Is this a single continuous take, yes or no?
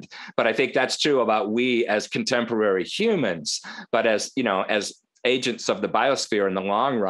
yes